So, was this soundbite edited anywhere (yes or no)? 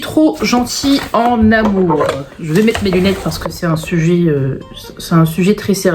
no